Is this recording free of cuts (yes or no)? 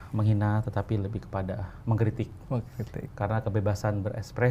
yes